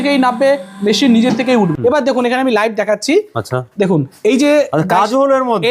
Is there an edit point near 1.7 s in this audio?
yes; 1 cut; at 1.7 s

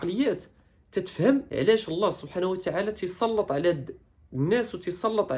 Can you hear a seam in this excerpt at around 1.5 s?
yes; 1 cut; at 1.5 s

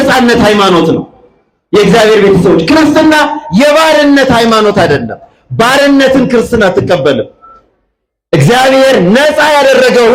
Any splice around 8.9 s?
no; 0 cuts

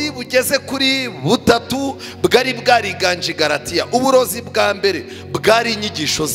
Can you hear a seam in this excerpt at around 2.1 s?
no; 0 cuts

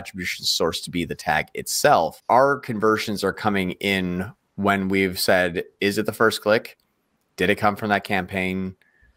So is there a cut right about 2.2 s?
yes; 1 cut; at 2.2 s

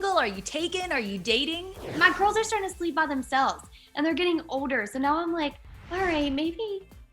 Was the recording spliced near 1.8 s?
yes; 1 cut; at 1.8 s

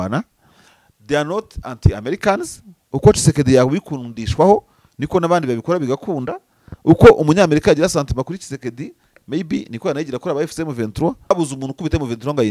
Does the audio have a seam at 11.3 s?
yes; 1 cut; at 11.3 s

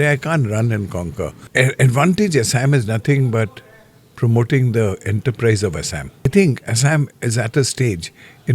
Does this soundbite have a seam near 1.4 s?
yes; 2 cuts; at 1.4 s, 6.3 s

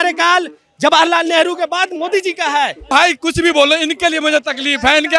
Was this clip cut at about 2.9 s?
yes; 1 cut; at 2.9 s

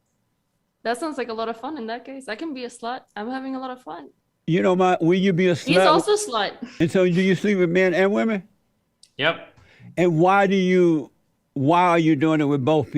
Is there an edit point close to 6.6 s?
yes; 1 cut; at 6.6 s

